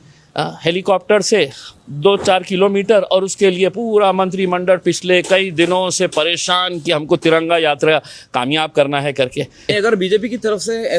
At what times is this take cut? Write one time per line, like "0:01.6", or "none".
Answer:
0:09.7